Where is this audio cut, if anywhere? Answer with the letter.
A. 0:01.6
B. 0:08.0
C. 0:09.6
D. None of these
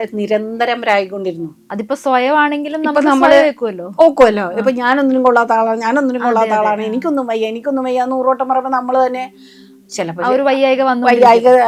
A